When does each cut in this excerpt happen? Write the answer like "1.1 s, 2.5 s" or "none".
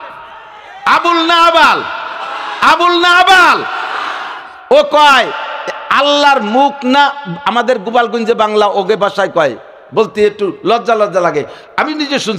none